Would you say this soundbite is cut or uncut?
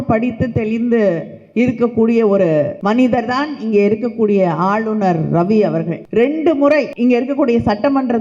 cut